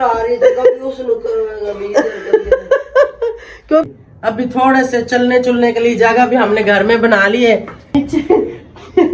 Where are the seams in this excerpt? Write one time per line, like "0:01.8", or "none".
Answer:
0:03.9
0:07.9